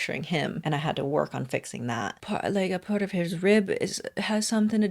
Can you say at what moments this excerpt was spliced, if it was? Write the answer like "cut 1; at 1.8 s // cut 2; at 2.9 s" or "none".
cut 1; at 2.2 s